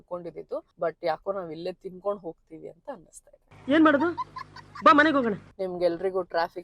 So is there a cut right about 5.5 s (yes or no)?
no